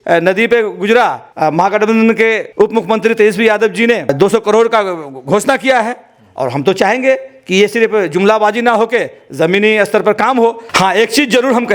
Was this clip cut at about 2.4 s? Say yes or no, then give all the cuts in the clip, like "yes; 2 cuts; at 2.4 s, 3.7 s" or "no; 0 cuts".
yes; 4 cuts; at 1.2 s, 2.4 s, 4.1 s, 10.6 s